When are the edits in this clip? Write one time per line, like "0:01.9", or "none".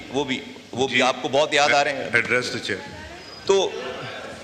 none